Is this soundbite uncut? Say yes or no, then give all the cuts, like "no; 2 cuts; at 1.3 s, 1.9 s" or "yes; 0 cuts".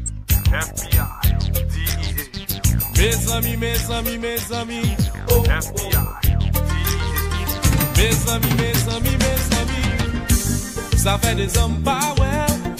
yes; 0 cuts